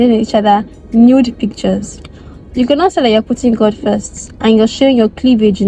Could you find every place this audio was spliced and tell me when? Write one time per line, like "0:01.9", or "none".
none